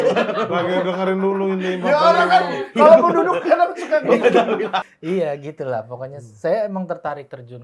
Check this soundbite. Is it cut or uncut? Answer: cut